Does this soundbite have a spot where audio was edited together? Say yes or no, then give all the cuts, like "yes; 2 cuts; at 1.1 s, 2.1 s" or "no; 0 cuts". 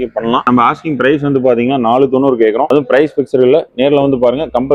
no; 0 cuts